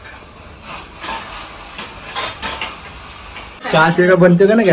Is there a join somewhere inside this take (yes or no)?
yes